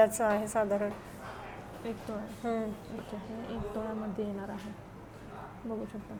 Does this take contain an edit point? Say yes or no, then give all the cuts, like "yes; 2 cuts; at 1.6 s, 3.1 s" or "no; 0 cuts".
no; 0 cuts